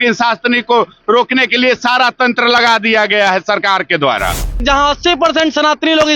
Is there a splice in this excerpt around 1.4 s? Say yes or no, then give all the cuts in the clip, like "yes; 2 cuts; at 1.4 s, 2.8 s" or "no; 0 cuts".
no; 1 cut; at 4.6 s